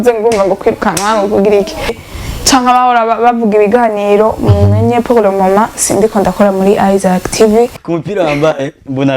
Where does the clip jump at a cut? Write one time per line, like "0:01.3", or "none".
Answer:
0:02.0
0:07.7